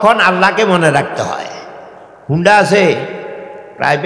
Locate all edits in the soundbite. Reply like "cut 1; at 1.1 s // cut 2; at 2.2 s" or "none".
none

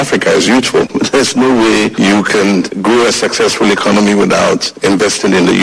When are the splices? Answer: cut 1; at 0.9 s // cut 2; at 4.7 s

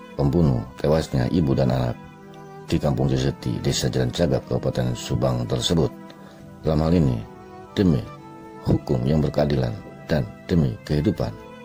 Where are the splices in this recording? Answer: none

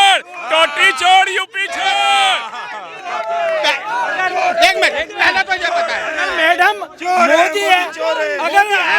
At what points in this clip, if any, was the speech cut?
none

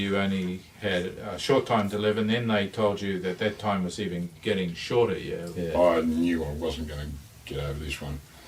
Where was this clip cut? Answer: cut 1; at 5.5 s

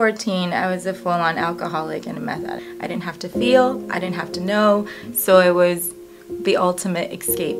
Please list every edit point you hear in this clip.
cut 1; at 2.7 s // cut 2; at 5.0 s

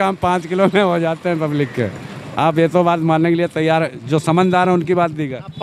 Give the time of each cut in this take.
none

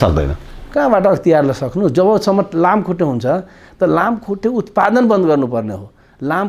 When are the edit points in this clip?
none

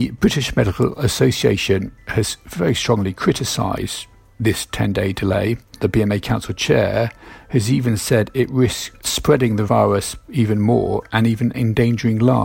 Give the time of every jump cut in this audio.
cut 1; at 5.7 s // cut 2; at 9.4 s

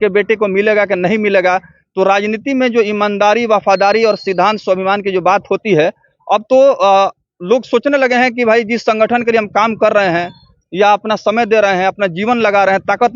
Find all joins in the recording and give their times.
none

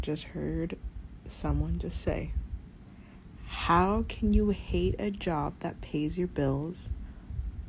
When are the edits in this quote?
none

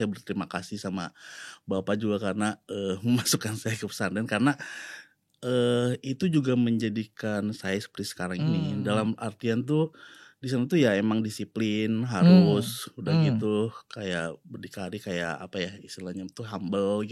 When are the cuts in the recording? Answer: none

